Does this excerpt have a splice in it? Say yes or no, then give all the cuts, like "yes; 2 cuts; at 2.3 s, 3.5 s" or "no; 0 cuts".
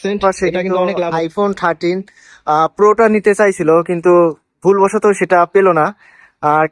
yes; 1 cut; at 1.1 s